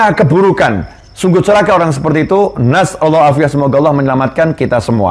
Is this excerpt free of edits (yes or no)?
yes